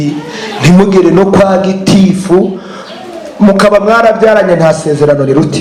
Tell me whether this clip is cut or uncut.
uncut